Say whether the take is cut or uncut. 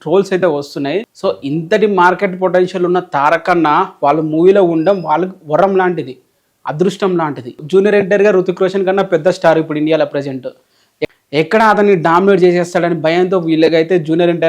cut